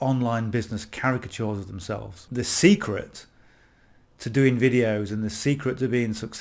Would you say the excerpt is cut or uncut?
cut